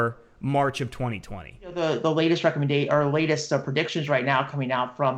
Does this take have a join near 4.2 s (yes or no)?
no